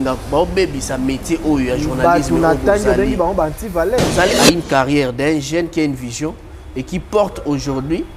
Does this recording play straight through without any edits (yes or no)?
no